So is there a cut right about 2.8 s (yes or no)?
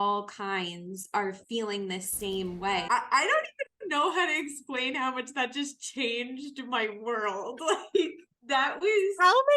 yes